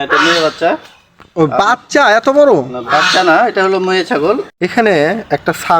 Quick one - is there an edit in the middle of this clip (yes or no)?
yes